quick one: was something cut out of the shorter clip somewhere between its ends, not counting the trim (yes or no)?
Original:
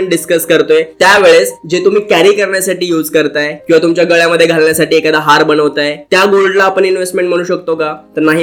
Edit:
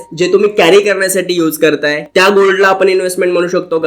yes